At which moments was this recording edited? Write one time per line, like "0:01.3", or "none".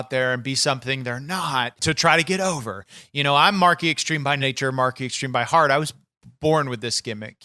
0:01.8
0:04.4